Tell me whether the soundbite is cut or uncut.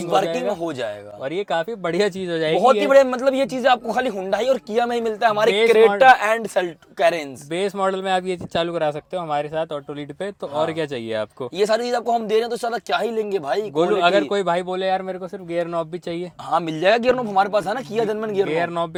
uncut